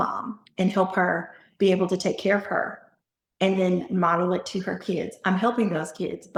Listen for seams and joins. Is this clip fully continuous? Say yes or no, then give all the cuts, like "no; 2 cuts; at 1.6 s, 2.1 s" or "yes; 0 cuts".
yes; 0 cuts